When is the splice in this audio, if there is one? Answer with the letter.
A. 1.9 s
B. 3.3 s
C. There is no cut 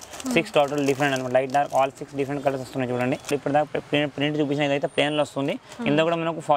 B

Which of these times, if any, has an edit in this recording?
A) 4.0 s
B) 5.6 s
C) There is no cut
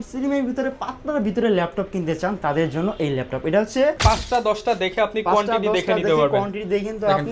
A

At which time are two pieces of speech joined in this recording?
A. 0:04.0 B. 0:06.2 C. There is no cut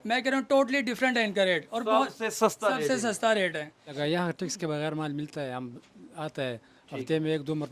A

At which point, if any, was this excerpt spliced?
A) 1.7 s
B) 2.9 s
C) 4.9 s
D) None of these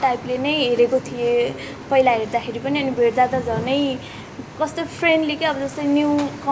D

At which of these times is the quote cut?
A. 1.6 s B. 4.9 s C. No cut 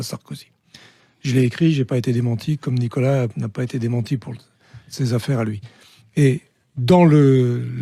C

